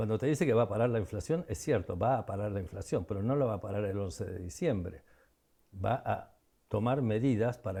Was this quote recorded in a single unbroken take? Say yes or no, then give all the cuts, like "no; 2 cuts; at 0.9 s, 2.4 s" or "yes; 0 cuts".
yes; 0 cuts